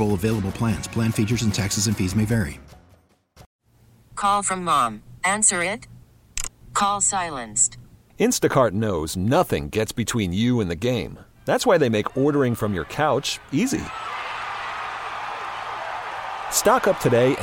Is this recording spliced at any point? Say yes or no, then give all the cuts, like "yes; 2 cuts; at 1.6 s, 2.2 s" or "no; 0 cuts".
yes; 1 cut; at 3.4 s